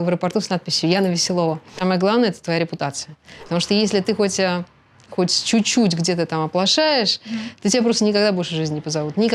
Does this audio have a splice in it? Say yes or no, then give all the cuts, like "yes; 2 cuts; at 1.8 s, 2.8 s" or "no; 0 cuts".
yes; 2 cuts; at 1.7 s, 3.5 s